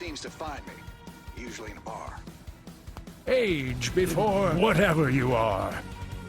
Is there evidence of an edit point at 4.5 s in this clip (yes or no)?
yes